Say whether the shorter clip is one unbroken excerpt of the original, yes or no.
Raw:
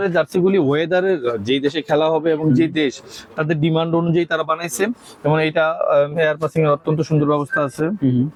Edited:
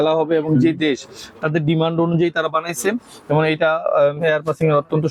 yes